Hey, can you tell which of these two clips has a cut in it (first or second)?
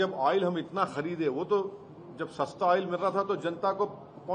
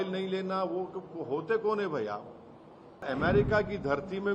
second